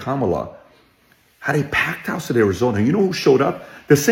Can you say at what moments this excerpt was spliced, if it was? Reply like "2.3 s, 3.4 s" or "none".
none

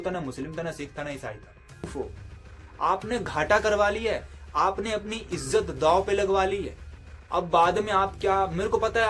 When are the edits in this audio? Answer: 1.9 s

